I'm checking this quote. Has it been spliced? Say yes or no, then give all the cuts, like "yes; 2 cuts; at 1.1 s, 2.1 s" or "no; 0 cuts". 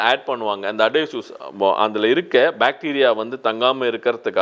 no; 0 cuts